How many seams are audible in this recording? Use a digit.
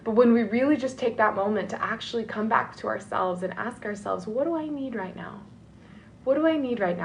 0